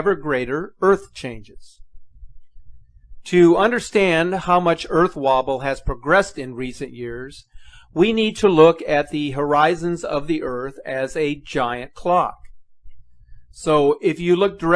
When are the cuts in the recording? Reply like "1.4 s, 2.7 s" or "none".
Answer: none